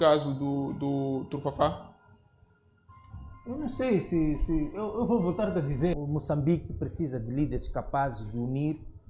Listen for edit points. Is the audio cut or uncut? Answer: cut